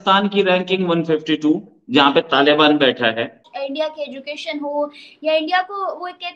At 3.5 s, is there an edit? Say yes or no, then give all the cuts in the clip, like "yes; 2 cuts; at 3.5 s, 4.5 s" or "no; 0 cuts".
yes; 1 cut; at 3.5 s